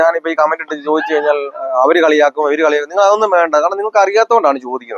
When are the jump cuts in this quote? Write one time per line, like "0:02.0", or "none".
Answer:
none